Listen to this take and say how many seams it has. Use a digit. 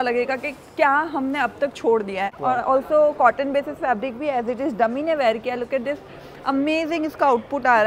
1